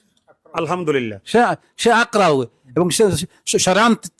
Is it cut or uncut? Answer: uncut